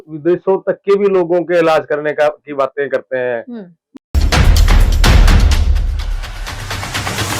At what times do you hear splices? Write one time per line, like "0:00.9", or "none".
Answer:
0:03.9